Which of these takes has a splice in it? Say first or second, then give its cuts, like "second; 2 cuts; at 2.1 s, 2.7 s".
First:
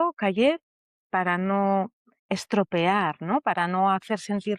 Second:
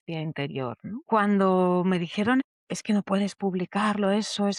second; 2 cuts; at 1.0 s, 2.4 s